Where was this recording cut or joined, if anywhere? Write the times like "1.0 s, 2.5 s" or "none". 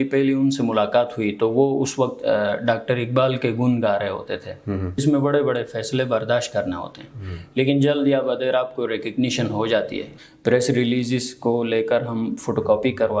5.0 s, 10.1 s